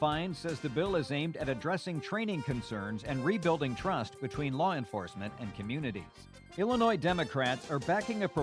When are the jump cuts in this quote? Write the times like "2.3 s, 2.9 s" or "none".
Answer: 6.4 s